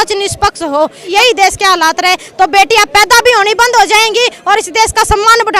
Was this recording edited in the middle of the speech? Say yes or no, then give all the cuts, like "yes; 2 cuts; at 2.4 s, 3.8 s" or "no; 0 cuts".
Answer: yes; 1 cut; at 1.1 s